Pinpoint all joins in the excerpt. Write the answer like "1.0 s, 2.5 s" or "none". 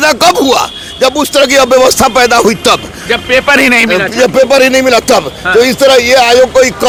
none